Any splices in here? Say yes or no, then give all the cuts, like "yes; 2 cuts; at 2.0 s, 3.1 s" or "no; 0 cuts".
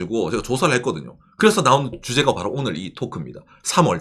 no; 0 cuts